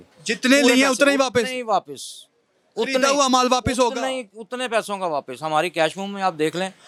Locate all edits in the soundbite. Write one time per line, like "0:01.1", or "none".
none